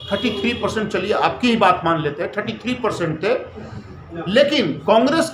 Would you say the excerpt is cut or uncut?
uncut